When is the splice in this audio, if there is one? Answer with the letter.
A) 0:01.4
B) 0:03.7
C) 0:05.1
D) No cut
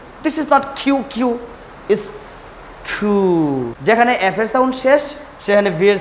B